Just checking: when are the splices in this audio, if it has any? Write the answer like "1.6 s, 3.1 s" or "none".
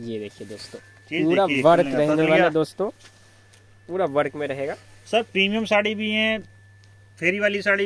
none